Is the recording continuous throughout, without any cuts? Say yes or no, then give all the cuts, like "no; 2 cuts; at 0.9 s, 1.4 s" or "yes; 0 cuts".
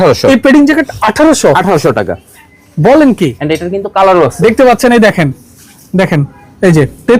yes; 0 cuts